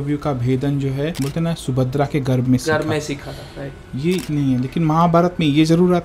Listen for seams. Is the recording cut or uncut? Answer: cut